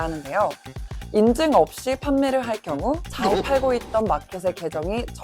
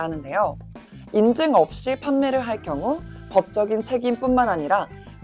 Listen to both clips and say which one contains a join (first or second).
first